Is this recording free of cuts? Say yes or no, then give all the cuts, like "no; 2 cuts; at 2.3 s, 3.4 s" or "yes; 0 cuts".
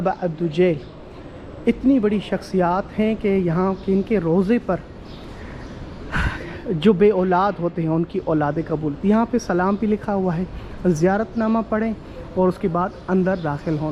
yes; 0 cuts